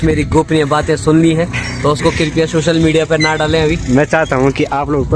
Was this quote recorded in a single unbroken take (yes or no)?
yes